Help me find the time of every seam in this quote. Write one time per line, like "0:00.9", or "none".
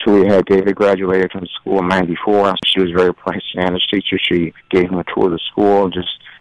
0:02.6